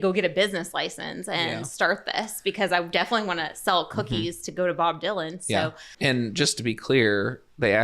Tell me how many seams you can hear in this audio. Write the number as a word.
one